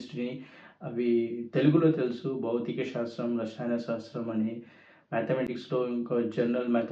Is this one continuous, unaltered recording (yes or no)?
yes